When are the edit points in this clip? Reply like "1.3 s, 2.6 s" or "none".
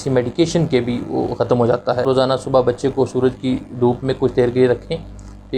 2.0 s